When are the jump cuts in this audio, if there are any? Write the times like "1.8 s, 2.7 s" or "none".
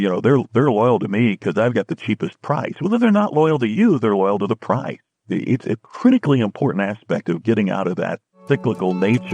none